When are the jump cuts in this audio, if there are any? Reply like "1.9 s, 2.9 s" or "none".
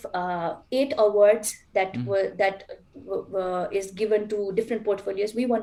none